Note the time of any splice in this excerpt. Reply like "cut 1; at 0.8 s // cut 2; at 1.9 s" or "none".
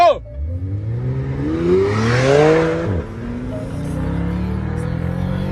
none

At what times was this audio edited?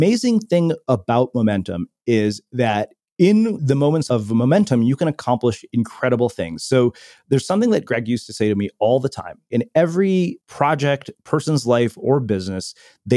cut 1; at 4.0 s // cut 2; at 9.5 s // cut 3; at 10.4 s

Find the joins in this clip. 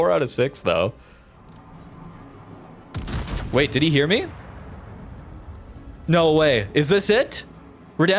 cut 1; at 1.3 s

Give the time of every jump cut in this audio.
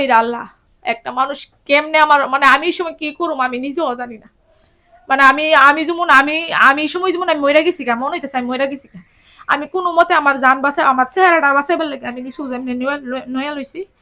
none

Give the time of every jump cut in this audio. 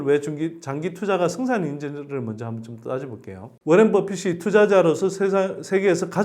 cut 1; at 3.5 s

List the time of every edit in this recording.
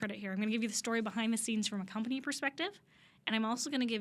none

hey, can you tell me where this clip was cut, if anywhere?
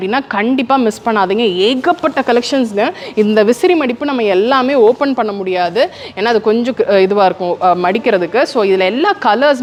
none

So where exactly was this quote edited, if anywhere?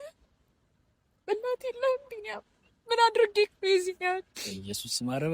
none

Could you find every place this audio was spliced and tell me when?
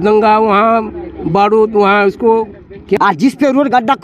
cut 1; at 3.0 s

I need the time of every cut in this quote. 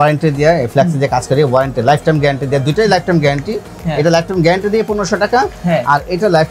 none

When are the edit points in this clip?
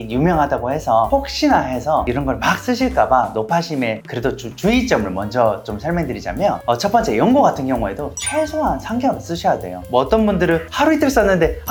none

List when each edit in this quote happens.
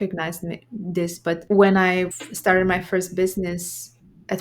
cut 1; at 1.4 s // cut 2; at 2.2 s

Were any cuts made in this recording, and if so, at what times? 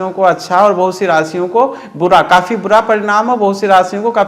none

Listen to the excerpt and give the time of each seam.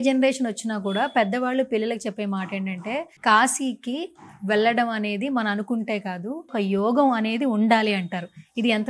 cut 1; at 3.1 s // cut 2; at 6.5 s

